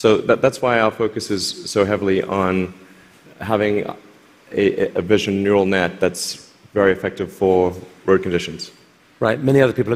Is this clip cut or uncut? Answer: uncut